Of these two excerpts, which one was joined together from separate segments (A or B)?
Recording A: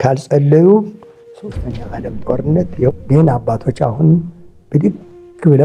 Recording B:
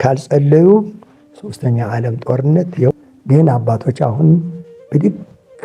A